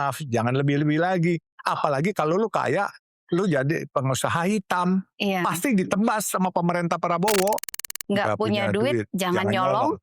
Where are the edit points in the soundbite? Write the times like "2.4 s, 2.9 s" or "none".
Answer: 7.8 s